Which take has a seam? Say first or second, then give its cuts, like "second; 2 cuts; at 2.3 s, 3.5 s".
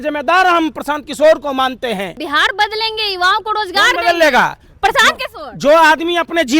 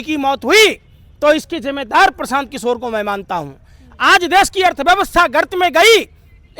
first; 1 cut; at 2.2 s